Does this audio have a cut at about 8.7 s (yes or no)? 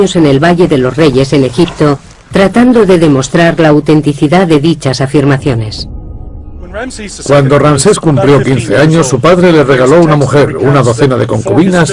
no